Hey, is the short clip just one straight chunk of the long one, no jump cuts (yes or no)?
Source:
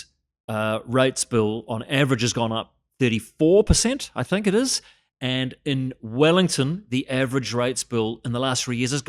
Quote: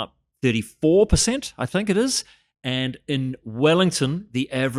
yes